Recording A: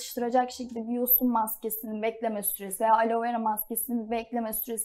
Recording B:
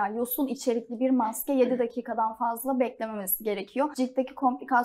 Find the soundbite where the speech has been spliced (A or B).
B